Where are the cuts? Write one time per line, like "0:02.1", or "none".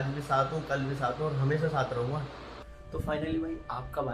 0:02.6